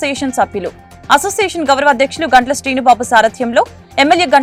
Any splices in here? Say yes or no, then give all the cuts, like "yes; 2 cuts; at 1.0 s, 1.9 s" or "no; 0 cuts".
no; 0 cuts